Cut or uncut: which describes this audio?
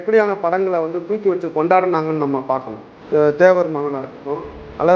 cut